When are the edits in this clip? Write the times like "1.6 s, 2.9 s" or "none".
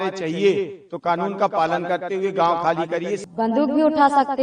3.2 s